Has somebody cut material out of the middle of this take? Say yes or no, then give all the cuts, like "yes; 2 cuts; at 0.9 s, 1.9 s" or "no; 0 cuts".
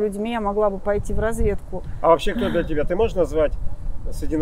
no; 0 cuts